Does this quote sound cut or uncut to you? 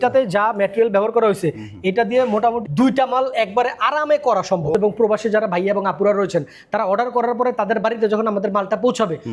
cut